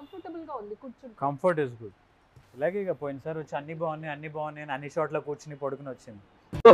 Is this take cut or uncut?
uncut